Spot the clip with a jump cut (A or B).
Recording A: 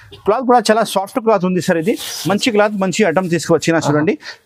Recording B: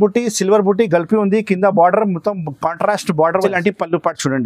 B